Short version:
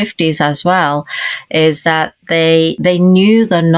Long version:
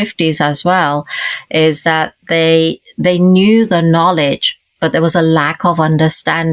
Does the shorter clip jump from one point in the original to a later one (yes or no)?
yes